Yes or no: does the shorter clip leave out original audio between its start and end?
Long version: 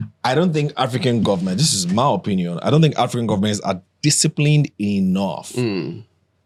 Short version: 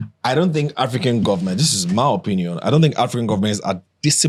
no